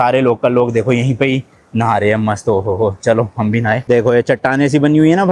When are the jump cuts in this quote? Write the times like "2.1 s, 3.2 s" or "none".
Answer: none

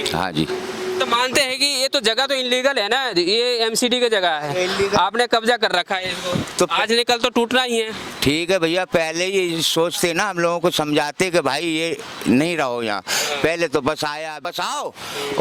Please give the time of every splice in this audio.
14.4 s

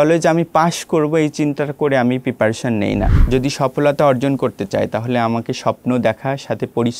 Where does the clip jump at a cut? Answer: 3.1 s

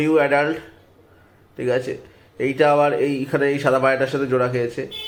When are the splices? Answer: none

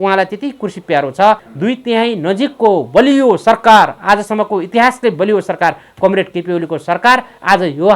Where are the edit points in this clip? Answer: 1.5 s

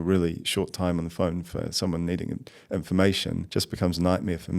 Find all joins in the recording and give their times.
3.4 s

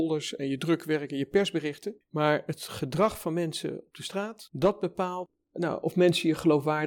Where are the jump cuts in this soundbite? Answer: 5.3 s

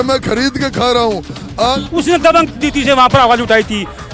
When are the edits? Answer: 1.8 s

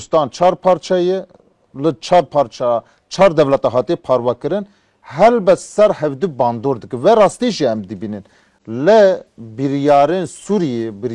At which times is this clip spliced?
none

